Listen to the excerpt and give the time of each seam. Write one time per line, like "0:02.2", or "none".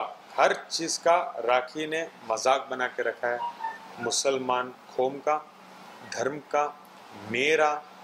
none